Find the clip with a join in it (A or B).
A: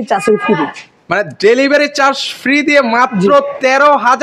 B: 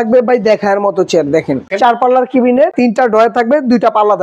B